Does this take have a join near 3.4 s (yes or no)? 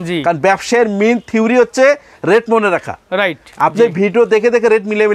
yes